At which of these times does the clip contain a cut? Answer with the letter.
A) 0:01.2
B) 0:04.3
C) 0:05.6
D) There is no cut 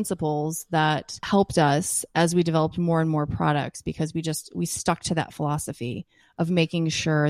A